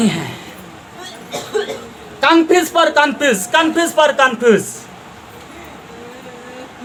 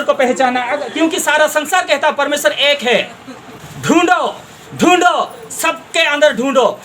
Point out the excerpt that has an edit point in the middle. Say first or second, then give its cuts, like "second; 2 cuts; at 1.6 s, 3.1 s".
second; 1 cut; at 3.6 s